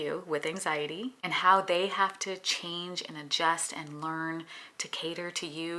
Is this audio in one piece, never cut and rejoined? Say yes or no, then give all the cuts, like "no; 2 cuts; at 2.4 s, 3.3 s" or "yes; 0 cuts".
no; 1 cut; at 1.2 s